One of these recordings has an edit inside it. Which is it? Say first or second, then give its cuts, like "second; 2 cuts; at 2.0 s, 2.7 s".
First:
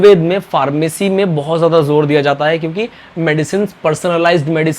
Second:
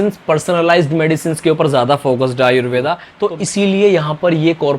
second; 1 cut; at 3.0 s